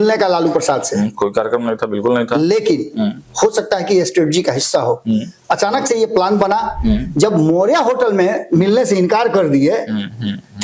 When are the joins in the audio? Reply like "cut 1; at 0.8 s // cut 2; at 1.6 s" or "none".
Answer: none